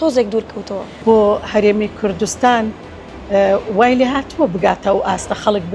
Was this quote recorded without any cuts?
no; 1 cut; at 1.0 s

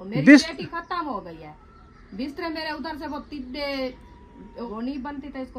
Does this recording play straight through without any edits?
no; 1 cut; at 4.7 s

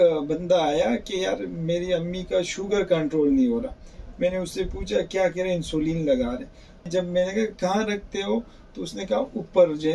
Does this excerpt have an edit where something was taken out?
no; 0 cuts

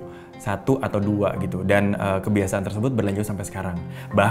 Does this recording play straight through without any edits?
yes; 0 cuts

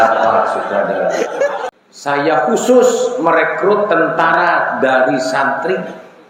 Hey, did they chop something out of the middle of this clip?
yes; 1 cut; at 1.6 s

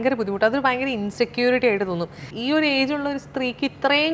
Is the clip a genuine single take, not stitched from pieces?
no; 1 cut; at 2.3 s

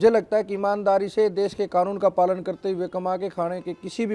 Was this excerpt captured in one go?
yes; 0 cuts

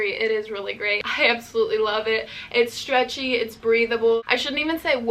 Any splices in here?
yes; 2 cuts; at 1.0 s, 4.2 s

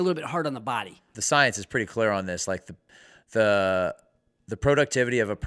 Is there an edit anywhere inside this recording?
yes; 1 cut; at 1.1 s

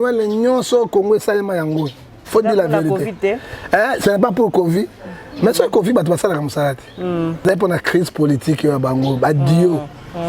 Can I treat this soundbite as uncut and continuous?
no; 1 cut; at 7.5 s

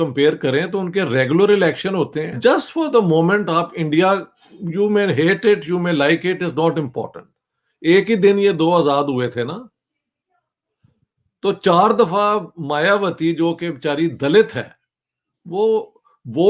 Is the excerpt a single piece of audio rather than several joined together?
no; 1 cut; at 2.2 s

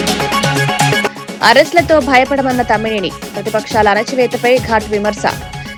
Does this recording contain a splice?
no; 0 cuts

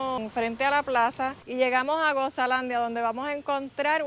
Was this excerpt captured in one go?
no; 1 cut; at 1.4 s

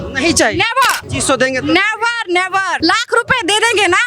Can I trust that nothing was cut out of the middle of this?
no; 2 cuts; at 1.1 s, 2.8 s

